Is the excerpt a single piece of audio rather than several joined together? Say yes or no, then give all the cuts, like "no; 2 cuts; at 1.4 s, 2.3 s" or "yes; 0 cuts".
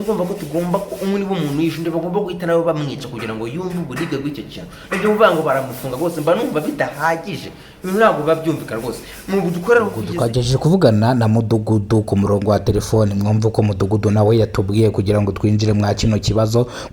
no; 1 cut; at 10.1 s